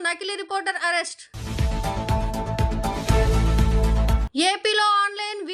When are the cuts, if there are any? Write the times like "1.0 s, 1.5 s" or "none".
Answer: none